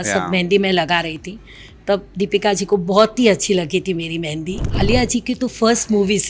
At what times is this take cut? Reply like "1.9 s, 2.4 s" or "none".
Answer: 4.7 s